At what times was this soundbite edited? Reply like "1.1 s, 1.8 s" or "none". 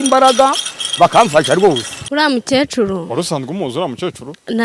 1.9 s

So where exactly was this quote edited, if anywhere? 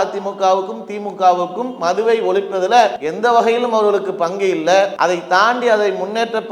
3.0 s, 4.9 s

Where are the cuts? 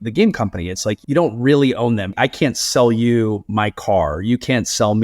1.0 s, 2.1 s

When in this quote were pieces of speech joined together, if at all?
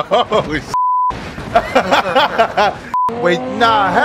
3.0 s

